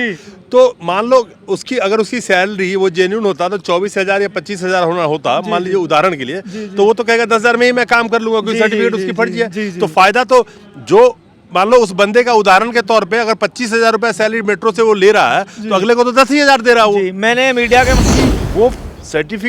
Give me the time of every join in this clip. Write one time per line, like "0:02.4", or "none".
0:18.0